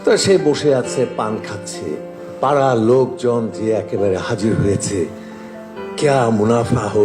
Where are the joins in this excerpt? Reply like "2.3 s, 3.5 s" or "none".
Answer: 2.1 s